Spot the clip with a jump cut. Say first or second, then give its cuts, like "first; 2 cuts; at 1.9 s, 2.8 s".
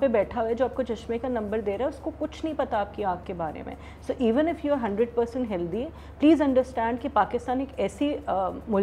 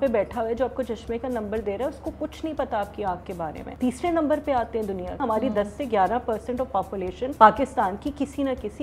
second; 3 cuts; at 3.6 s, 5.1 s, 7.3 s